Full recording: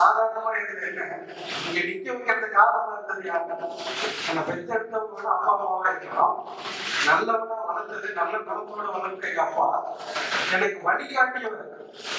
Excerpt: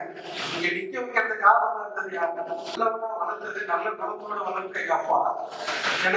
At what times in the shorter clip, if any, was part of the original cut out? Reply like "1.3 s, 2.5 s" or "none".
2.8 s